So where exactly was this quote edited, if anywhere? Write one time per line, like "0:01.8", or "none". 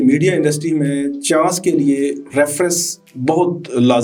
none